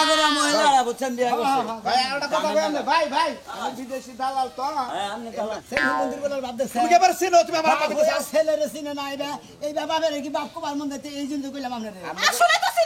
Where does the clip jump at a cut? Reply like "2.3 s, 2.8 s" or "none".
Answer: 5.6 s